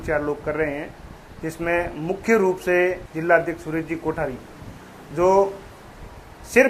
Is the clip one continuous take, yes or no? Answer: yes